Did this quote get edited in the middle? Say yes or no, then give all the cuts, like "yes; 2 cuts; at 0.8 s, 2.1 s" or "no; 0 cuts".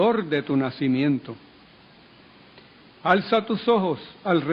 yes; 1 cut; at 1.0 s